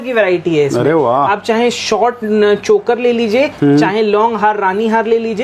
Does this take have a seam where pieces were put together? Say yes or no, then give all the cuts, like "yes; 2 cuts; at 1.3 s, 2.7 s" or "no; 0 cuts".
no; 0 cuts